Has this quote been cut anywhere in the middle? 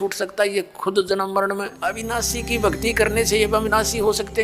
yes; 1 cut; at 2.0 s

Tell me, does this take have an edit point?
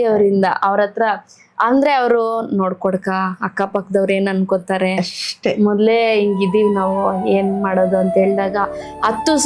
no; 0 cuts

